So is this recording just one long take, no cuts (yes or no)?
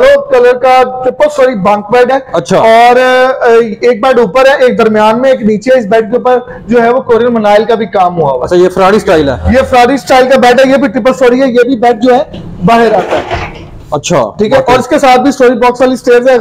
yes